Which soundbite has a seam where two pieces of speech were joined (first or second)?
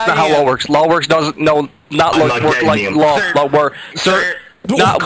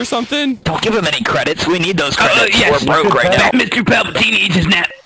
second